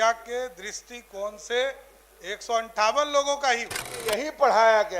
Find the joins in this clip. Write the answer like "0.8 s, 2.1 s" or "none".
3.4 s